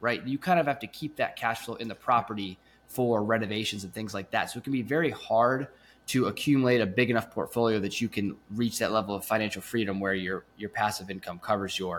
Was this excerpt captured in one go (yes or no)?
yes